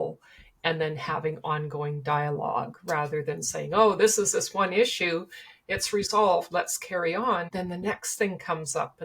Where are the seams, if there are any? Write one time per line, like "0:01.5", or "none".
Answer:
0:07.5